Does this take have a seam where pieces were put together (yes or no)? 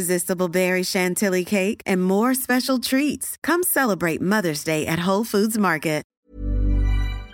yes